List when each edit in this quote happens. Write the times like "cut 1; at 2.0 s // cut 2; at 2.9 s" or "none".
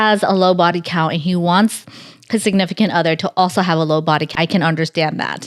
cut 1; at 4.3 s